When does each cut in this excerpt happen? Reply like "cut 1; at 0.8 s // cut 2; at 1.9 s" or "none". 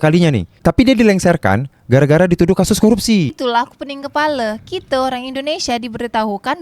cut 1; at 3.3 s